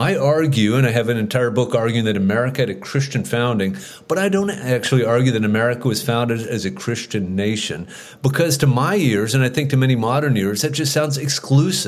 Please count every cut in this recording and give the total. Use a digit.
0